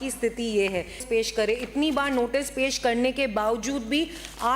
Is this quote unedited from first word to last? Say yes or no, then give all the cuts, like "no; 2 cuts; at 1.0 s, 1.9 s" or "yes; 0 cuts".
no; 1 cut; at 1.0 s